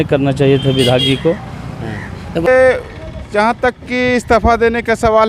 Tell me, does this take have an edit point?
yes; 1 cut; at 2.5 s

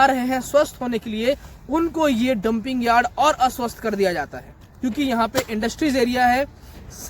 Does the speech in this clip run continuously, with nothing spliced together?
no; 1 cut; at 4.6 s

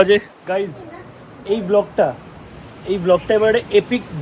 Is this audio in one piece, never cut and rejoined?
yes; 0 cuts

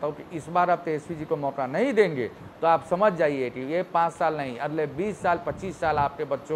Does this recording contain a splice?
no; 0 cuts

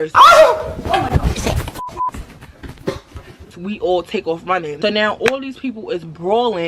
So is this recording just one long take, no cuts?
no; 1 cut; at 4.7 s

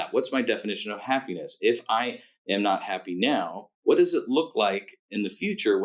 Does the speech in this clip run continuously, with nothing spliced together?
yes; 0 cuts

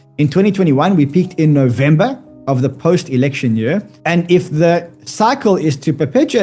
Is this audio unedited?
no; 1 cut; at 3.9 s

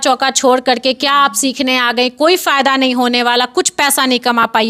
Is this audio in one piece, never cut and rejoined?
yes; 0 cuts

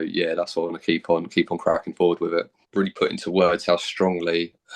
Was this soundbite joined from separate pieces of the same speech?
yes; 1 cut; at 2.6 s

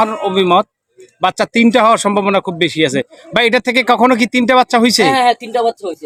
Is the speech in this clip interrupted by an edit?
no; 0 cuts

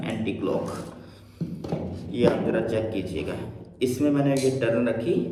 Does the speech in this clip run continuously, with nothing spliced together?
yes; 0 cuts

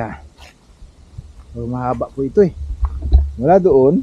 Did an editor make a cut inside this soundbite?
no; 0 cuts

